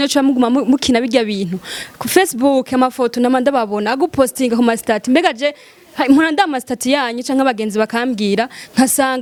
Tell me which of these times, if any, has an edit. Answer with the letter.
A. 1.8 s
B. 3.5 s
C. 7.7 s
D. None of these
D